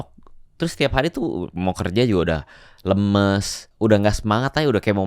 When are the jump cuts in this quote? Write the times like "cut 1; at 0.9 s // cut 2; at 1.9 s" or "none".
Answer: cut 1; at 3.7 s